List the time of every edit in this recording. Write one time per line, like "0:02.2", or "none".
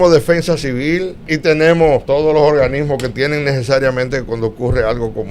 0:01.3
0:02.0

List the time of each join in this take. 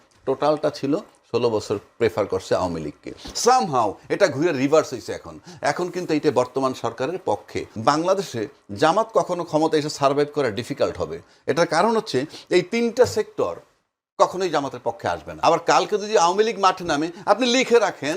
0:07.7
0:15.3

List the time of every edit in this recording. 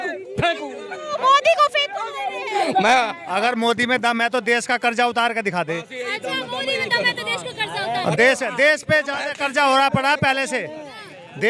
0:03.2

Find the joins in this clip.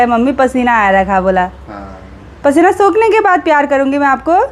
none

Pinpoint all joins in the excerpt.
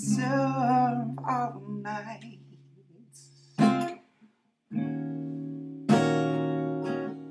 0:02.8

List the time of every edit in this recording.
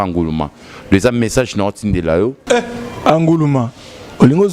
0:02.4

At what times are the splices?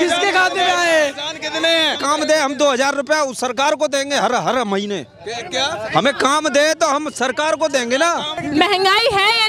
0:02.0
0:08.4

